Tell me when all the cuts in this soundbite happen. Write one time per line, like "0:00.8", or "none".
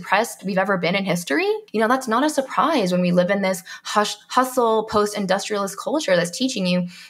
0:01.6